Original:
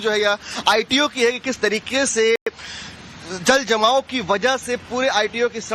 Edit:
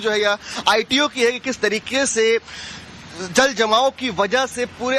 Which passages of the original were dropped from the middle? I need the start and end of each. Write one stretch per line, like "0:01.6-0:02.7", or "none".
0:02.4-0:02.5